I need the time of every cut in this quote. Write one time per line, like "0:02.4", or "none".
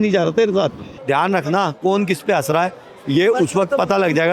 0:01.0